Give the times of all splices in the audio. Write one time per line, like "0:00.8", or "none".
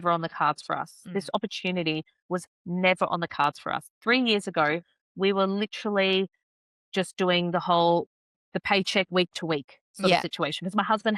none